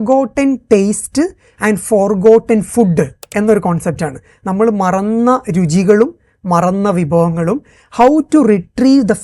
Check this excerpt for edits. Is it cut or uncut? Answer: uncut